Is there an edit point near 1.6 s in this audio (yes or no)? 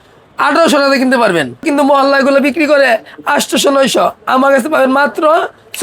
yes